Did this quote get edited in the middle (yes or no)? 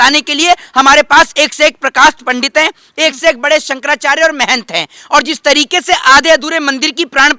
no